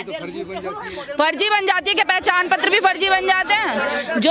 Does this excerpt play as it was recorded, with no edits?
yes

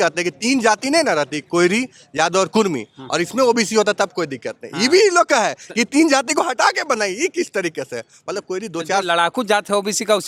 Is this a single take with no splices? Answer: yes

